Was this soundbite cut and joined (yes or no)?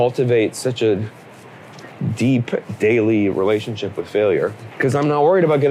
yes